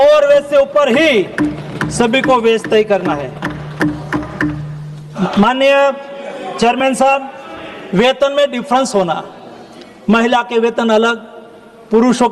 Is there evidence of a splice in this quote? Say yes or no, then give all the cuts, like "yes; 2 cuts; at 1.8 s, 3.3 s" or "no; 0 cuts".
yes; 1 cut; at 5.3 s